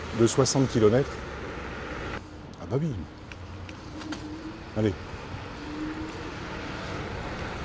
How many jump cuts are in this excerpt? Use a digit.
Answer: 1